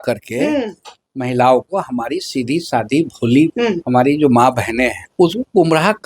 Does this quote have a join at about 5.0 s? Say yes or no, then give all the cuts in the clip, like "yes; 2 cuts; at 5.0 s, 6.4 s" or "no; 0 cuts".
yes; 1 cut; at 5.0 s